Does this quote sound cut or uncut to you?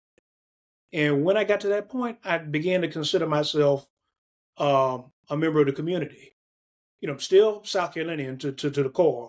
uncut